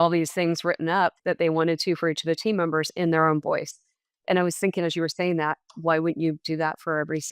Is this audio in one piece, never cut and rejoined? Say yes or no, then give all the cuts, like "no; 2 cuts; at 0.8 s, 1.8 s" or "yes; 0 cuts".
no; 1 cut; at 1.2 s